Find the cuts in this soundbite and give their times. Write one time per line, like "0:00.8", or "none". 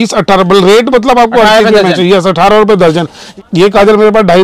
0:03.3